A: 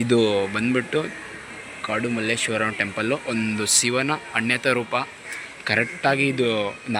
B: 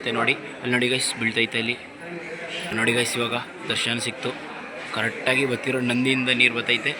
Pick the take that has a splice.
B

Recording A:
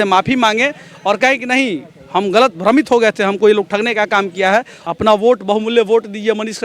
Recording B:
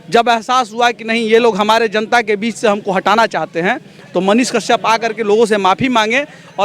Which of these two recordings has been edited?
A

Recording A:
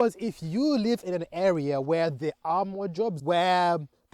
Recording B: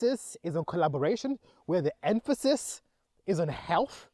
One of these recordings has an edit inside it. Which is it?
A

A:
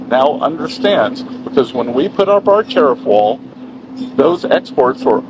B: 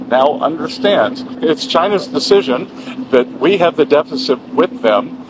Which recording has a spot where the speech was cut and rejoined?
B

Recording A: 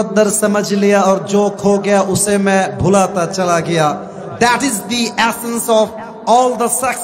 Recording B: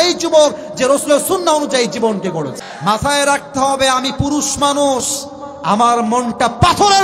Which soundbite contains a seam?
B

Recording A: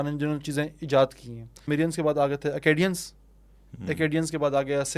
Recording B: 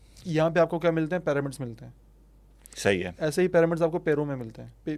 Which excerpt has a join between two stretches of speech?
A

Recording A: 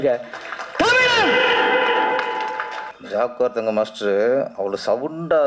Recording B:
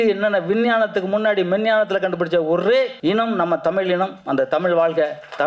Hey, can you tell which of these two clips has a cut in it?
A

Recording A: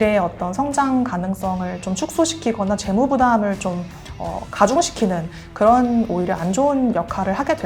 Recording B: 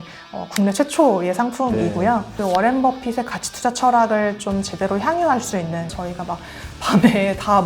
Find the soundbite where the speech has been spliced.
B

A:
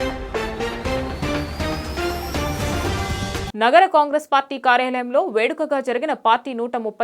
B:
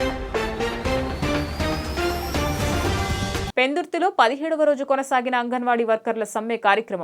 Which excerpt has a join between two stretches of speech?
B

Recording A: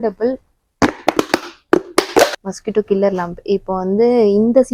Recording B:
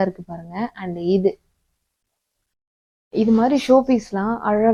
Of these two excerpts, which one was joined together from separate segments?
A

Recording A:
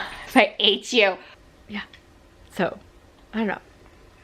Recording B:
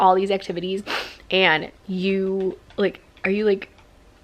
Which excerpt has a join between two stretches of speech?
A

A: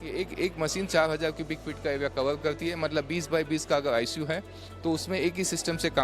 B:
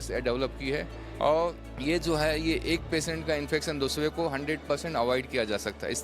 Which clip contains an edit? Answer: B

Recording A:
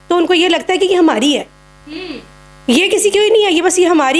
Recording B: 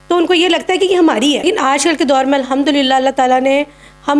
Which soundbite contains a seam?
B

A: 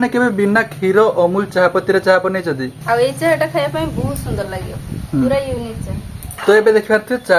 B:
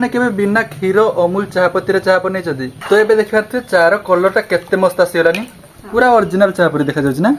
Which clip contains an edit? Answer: B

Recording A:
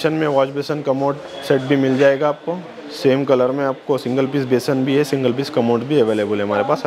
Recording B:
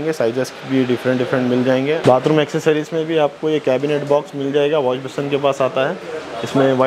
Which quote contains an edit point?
B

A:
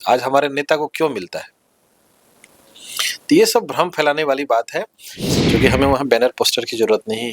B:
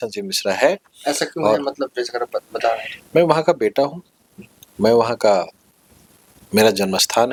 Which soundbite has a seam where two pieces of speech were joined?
A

